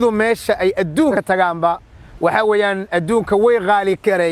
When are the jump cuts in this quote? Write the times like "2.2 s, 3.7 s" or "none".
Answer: 1.1 s